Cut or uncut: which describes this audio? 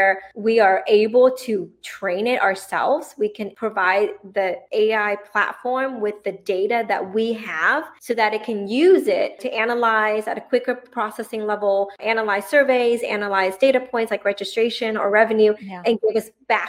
uncut